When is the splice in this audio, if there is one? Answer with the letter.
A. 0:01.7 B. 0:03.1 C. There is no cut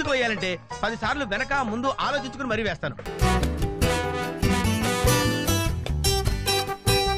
C